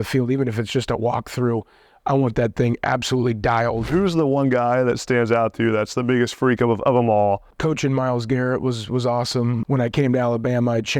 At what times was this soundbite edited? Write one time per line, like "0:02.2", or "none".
0:03.8
0:07.5
0:09.6